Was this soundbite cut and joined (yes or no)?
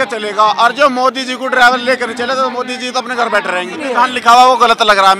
yes